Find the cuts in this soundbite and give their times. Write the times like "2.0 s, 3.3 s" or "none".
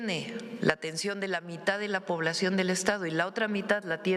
none